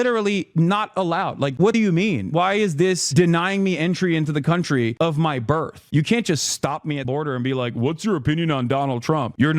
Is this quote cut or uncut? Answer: cut